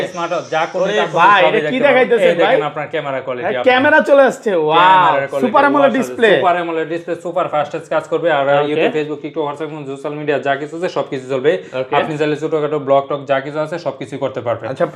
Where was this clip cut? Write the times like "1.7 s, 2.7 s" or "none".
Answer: none